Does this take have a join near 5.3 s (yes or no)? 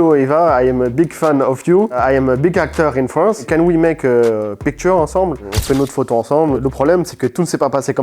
no